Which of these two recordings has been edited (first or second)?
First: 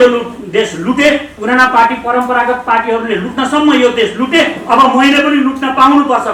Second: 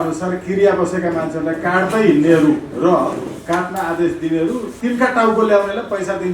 second